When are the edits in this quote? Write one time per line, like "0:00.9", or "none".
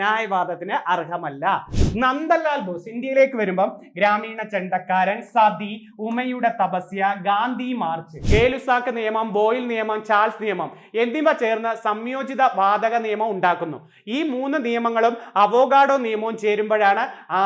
0:01.7
0:08.1